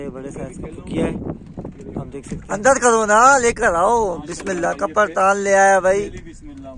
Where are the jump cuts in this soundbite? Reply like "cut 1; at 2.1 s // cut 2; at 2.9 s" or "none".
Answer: cut 1; at 2.4 s